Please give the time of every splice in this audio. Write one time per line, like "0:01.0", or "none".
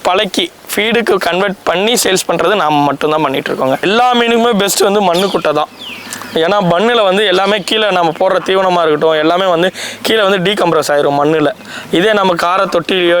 0:03.8